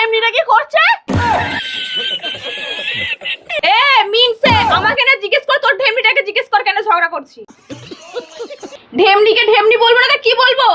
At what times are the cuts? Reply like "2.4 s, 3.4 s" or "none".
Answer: 3.6 s, 8.8 s